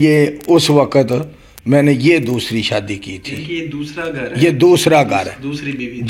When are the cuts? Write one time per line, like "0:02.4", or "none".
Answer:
none